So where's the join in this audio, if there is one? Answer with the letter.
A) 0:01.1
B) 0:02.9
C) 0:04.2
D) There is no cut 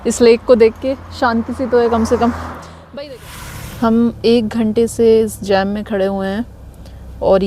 B